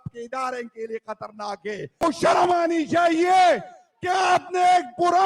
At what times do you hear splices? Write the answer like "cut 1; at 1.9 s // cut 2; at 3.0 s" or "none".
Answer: cut 1; at 1.9 s